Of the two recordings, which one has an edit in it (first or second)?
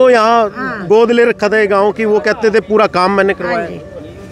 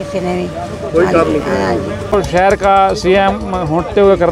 second